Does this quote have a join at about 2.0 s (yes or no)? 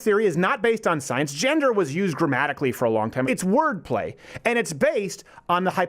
no